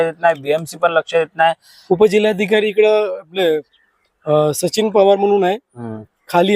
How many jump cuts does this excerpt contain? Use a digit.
1